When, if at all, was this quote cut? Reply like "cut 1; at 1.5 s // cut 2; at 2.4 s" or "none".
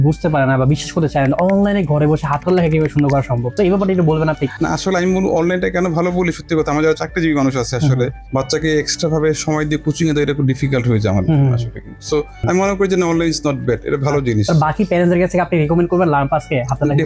cut 1; at 3.5 s // cut 2; at 12.4 s